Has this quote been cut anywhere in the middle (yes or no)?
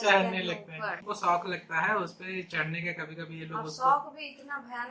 yes